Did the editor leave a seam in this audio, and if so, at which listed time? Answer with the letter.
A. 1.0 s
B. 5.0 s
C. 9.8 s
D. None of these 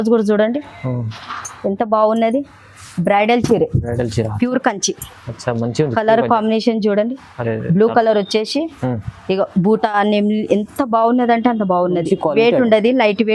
A